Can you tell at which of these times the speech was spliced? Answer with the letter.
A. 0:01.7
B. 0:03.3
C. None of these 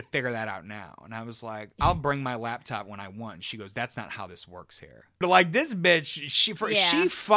A